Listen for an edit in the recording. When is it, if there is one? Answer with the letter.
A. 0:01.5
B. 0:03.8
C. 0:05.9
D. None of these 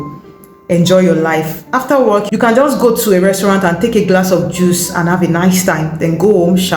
D